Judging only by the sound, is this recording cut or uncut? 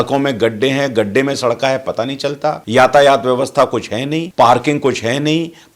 cut